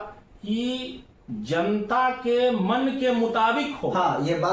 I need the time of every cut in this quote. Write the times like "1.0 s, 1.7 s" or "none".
none